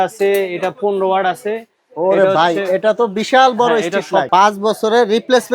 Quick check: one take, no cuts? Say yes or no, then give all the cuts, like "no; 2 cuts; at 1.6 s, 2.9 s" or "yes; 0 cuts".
no; 1 cut; at 4.3 s